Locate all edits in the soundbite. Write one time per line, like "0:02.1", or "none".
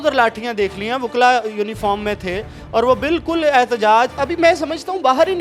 none